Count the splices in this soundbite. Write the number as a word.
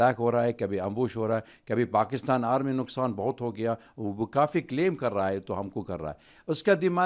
zero